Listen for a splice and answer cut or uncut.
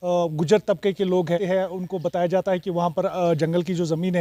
cut